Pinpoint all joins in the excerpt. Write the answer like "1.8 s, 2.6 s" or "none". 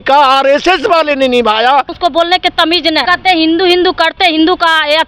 1.9 s, 3.0 s